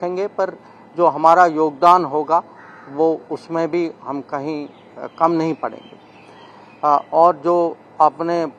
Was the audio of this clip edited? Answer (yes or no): no